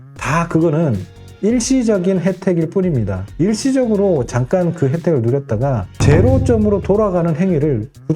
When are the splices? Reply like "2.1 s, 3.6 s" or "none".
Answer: 5.9 s

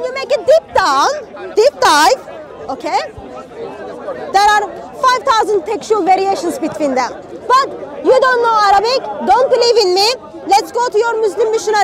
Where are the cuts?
none

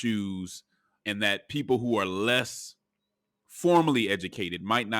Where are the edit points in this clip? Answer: 0.9 s

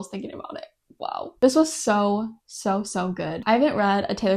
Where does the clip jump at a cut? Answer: none

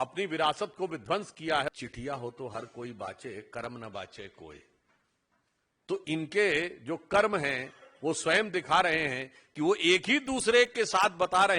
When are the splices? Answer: 1.7 s

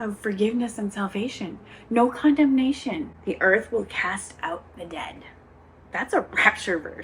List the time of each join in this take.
3.1 s

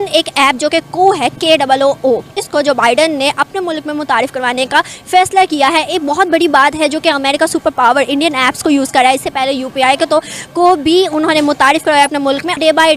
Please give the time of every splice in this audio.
none

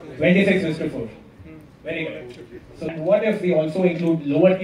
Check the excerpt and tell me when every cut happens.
2.9 s

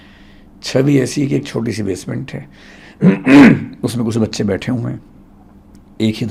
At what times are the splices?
none

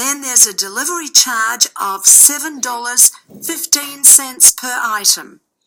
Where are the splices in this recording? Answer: 4.5 s

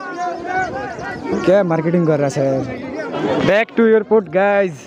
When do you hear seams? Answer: 3.1 s

